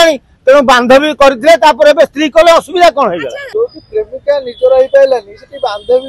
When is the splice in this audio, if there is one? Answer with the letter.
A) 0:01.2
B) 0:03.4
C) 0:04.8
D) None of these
B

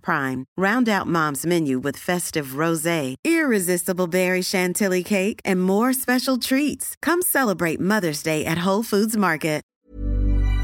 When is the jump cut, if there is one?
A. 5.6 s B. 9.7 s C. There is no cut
B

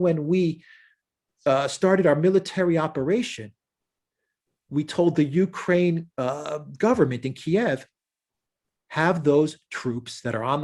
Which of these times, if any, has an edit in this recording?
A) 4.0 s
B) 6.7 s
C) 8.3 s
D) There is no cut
D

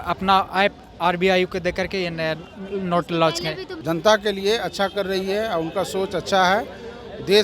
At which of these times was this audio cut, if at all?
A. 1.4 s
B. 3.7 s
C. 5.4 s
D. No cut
B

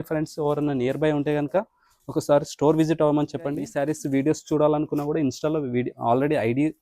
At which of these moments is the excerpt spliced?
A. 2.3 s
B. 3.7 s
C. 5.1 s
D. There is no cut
B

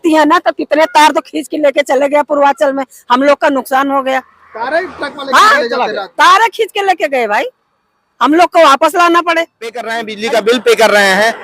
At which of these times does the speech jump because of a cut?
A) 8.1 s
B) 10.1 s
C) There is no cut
B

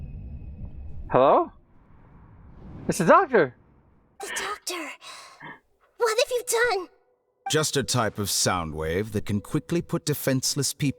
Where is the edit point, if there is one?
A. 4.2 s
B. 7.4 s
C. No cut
A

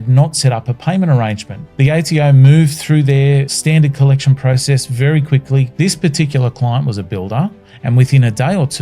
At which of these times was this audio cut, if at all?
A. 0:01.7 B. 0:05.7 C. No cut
B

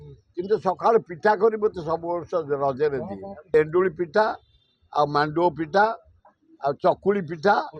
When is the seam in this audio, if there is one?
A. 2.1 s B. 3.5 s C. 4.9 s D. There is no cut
B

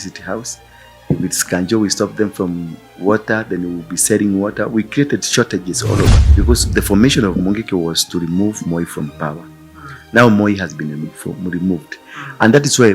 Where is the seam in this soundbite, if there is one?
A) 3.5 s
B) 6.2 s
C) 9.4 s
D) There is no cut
B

